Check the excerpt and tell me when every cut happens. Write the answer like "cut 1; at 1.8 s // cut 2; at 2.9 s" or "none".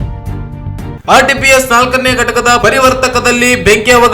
cut 1; at 1.0 s